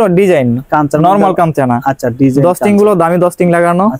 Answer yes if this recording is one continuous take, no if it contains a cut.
yes